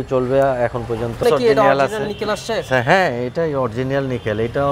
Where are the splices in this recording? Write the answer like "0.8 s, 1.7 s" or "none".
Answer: 1.2 s